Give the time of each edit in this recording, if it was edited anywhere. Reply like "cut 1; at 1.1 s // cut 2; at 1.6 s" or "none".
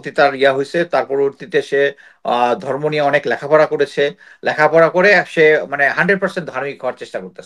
none